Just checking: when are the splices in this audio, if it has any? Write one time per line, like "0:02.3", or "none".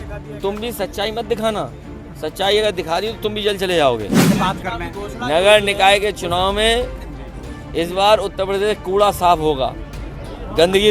0:04.3

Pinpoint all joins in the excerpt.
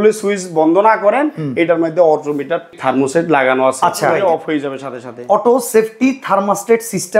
0:02.7
0:04.1

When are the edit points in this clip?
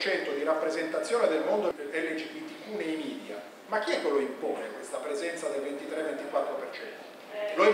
none

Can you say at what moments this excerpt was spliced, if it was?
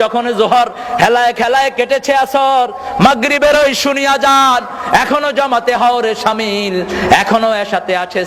none

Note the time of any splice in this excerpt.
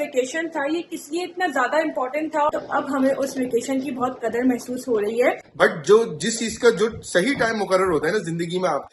0:02.5
0:05.5

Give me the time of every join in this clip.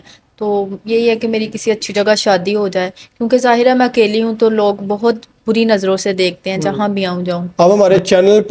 0:07.4

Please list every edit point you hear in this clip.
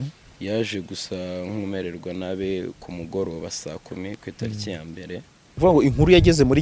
0:05.5

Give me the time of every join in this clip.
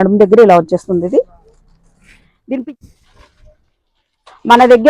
0:02.6

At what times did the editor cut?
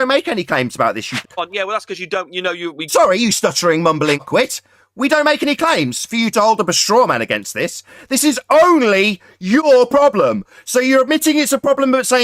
0:01.2
0:04.2

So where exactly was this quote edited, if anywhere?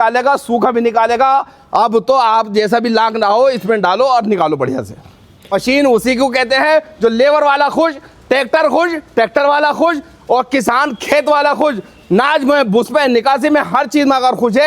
0:05.5

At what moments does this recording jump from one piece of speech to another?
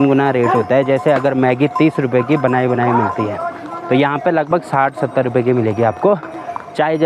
none

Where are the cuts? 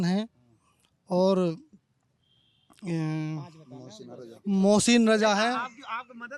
none

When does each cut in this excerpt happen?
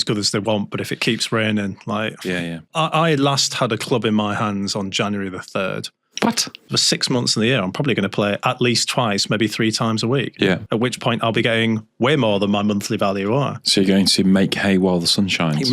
0:02.7
0:06.8

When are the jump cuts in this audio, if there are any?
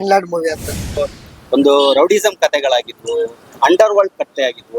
0:00.9

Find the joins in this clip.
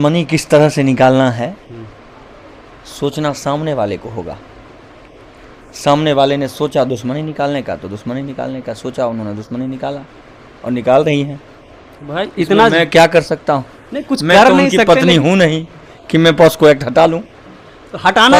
none

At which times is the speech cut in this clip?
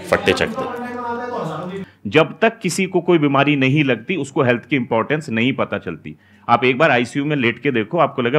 0:01.8

